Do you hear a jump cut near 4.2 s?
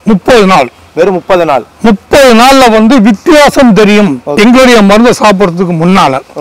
yes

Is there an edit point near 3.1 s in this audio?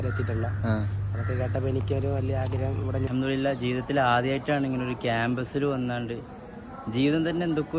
yes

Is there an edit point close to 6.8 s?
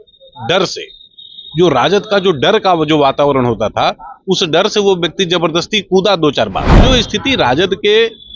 yes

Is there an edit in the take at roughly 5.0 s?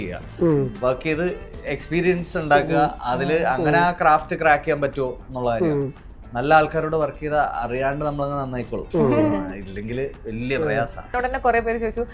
no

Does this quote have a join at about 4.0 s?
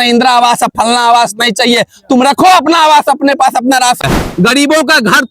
yes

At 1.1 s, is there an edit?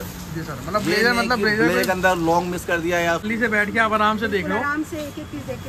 no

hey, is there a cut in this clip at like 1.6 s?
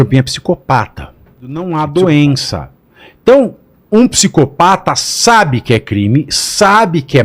yes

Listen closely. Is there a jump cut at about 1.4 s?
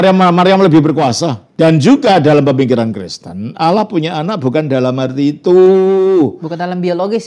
yes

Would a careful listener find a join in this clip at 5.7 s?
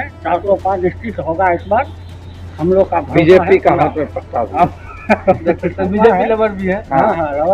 no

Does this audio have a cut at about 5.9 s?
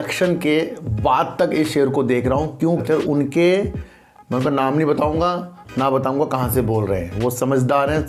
no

